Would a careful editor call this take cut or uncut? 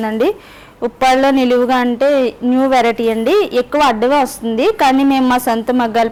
uncut